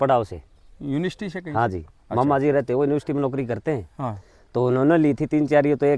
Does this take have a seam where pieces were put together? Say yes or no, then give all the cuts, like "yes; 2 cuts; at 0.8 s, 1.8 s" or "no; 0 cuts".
no; 0 cuts